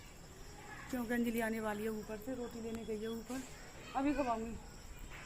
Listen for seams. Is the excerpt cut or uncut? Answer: uncut